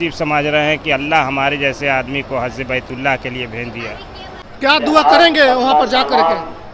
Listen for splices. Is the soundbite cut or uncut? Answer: cut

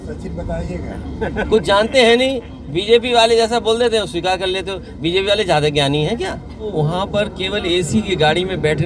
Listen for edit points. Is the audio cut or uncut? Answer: cut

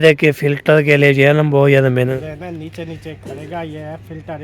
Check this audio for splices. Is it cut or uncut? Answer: cut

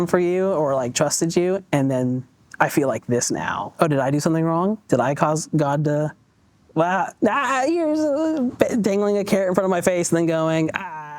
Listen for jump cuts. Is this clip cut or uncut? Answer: cut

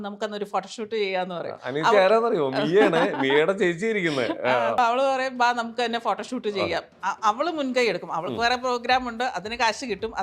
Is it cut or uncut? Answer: cut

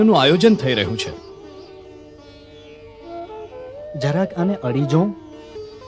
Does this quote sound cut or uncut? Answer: uncut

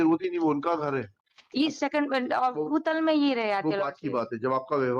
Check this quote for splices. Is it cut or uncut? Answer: cut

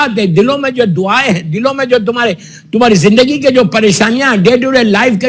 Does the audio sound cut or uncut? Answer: uncut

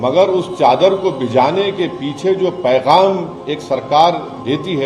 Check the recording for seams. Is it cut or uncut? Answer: uncut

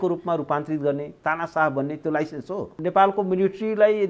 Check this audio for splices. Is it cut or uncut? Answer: cut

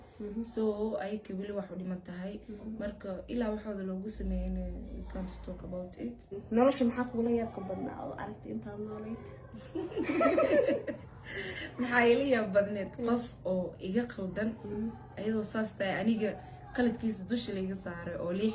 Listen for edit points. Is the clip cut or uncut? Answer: cut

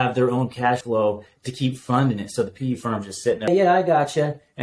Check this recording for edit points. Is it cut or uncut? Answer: cut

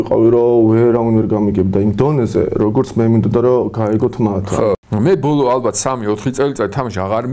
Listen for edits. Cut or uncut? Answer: cut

